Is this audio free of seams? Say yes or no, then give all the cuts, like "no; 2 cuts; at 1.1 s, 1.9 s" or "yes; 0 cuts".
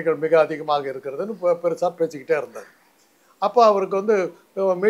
yes; 0 cuts